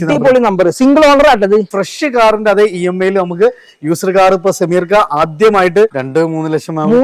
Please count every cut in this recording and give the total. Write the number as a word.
two